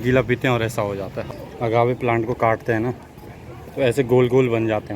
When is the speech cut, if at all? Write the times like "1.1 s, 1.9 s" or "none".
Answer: 1.2 s